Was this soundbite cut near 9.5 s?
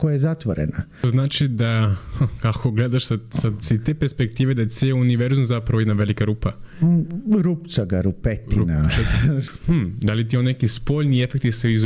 yes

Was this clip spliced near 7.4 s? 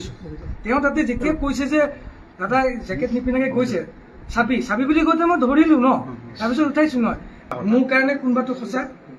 yes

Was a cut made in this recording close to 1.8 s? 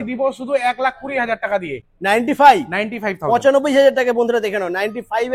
yes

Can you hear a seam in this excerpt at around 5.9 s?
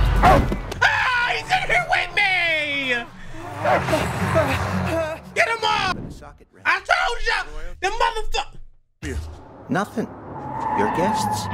yes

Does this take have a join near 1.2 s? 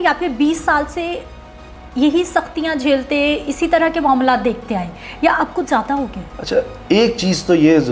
no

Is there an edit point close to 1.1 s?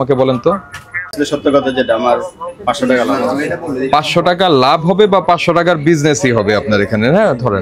yes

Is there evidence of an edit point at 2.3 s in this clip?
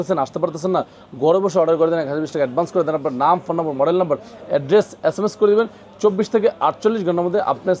no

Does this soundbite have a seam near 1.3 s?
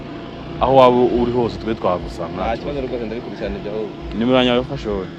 no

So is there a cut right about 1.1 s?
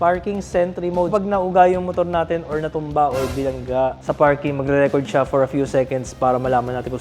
yes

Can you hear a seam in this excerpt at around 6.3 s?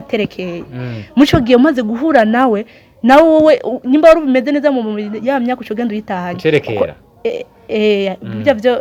no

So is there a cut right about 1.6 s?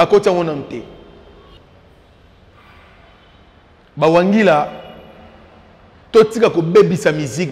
yes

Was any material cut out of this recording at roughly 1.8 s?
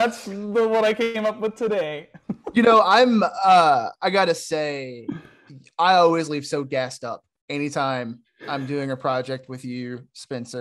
no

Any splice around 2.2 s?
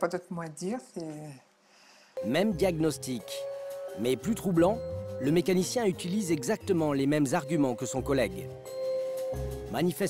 yes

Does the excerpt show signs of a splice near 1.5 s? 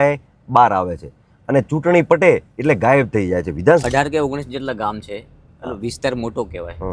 no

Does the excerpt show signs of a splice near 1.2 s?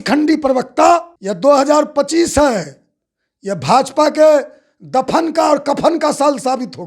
yes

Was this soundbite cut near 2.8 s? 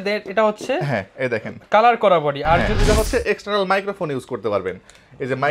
yes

